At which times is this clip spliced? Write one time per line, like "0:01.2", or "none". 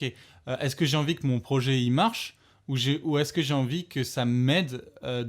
none